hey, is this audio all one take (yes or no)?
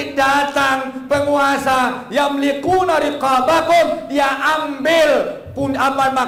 yes